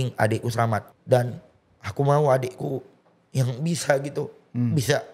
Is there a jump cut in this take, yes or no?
yes